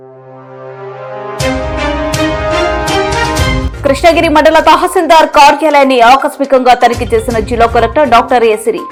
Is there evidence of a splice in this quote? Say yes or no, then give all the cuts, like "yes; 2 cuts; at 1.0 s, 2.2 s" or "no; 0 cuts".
no; 0 cuts